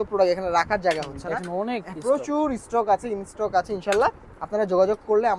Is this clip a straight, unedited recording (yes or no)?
yes